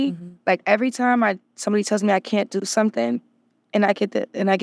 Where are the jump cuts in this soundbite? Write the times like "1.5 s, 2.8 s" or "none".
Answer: none

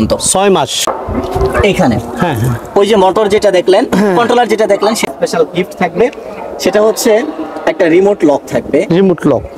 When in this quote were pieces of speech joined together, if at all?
0.8 s, 5.1 s

